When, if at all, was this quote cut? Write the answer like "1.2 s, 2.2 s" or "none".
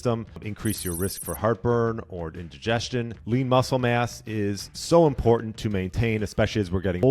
3.2 s